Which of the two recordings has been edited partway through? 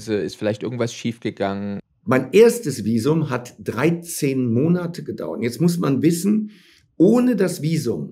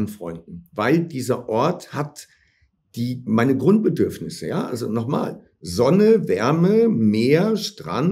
first; 1 cut; at 1.8 s

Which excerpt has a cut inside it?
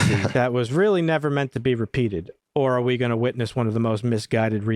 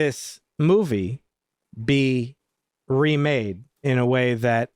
first; 1 cut; at 2.3 s

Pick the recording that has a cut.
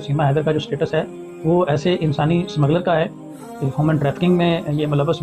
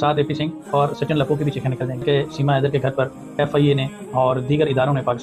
second; 1 cut; at 2.0 s

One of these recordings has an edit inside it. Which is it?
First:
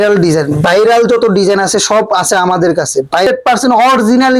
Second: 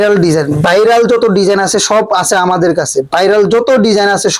first; 1 cut; at 3.3 s

